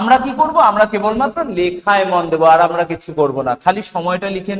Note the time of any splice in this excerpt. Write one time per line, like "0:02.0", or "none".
none